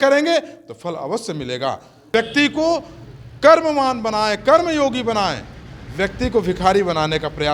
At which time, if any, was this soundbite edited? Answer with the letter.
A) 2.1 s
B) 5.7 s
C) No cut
A